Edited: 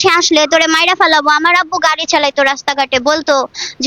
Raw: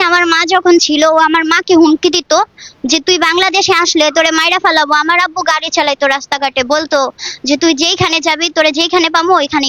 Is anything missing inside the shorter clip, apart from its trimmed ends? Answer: no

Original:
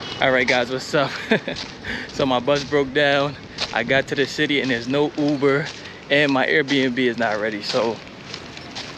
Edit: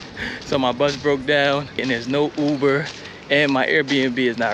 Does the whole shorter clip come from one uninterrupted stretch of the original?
no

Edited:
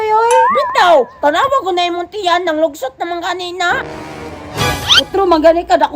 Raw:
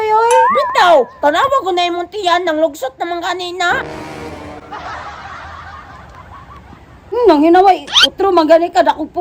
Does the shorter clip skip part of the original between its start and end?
yes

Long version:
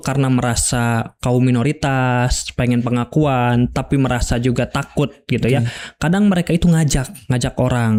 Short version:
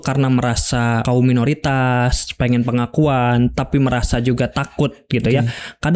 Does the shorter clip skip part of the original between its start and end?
yes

